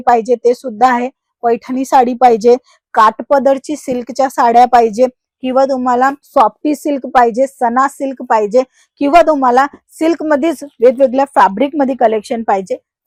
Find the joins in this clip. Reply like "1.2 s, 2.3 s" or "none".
none